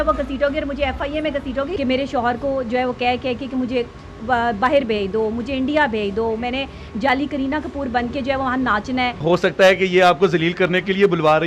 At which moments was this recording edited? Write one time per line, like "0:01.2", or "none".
0:01.7
0:09.2

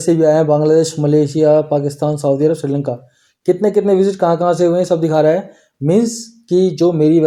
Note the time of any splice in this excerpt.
none

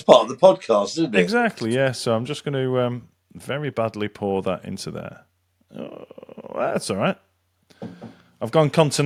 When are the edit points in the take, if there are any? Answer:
none

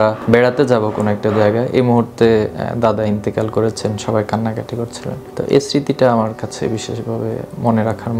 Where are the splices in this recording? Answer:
none

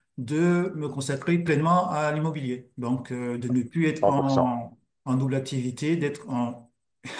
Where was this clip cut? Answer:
none

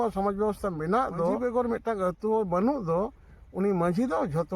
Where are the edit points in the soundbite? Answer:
0:01.4

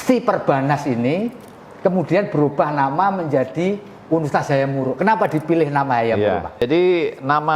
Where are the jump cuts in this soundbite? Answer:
0:06.6

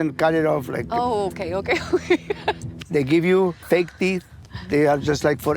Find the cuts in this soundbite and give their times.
0:02.7
0:03.9

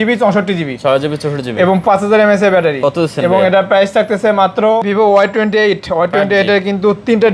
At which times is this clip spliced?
0:04.8

